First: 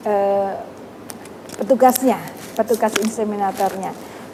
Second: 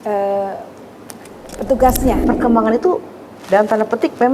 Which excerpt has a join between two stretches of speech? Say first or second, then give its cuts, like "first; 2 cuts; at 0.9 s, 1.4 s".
second; 1 cut; at 2.2 s